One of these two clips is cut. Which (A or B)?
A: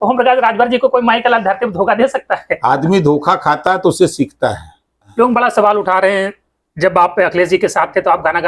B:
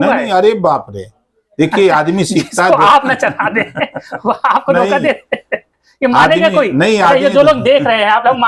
A